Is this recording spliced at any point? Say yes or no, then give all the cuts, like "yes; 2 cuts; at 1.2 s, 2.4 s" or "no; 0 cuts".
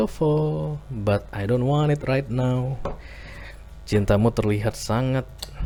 no; 0 cuts